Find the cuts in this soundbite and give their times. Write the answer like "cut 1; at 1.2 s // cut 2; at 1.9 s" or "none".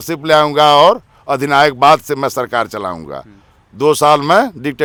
none